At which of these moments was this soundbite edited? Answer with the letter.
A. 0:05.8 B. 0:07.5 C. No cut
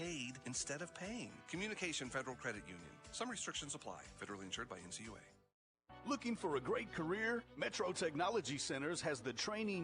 A